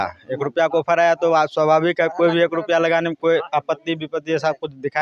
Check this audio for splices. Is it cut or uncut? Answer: uncut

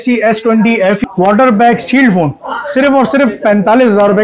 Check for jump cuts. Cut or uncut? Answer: cut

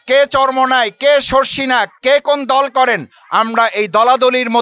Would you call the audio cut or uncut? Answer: cut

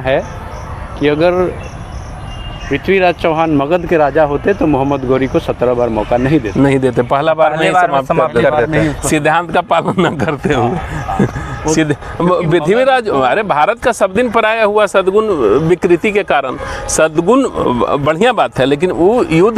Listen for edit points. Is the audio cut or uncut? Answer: uncut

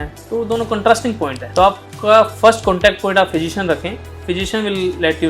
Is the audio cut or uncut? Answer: cut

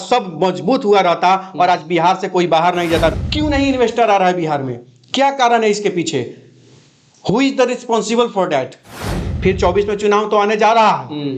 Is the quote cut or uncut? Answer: cut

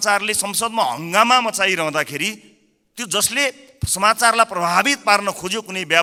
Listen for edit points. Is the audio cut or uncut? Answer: uncut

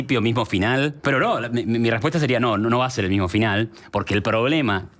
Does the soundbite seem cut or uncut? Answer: cut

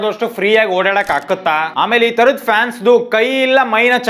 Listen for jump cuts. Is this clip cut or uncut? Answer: cut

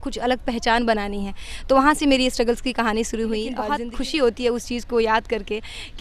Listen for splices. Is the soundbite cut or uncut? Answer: cut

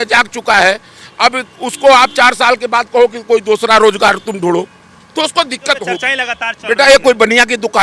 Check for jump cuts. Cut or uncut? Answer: cut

